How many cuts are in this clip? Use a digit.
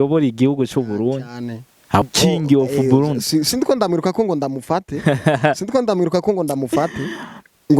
1